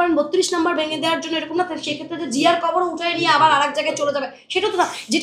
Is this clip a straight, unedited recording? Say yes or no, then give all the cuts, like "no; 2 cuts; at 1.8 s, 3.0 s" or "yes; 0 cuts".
yes; 0 cuts